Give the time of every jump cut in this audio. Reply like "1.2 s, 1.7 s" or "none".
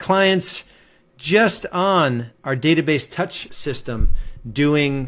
3.4 s